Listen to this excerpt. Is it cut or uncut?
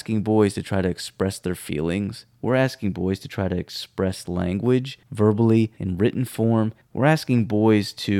cut